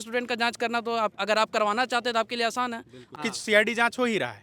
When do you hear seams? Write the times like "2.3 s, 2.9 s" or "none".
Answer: 3.1 s